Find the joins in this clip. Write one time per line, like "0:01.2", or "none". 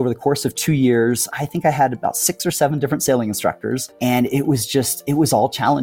0:01.3
0:03.9